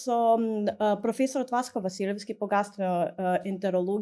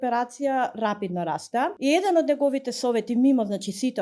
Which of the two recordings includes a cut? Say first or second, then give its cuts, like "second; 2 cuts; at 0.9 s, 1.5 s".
second; 1 cut; at 1.8 s